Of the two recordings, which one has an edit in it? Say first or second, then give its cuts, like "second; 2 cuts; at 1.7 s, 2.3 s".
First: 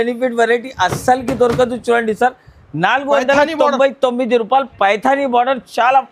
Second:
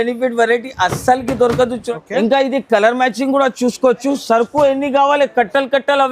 second; 1 cut; at 1.8 s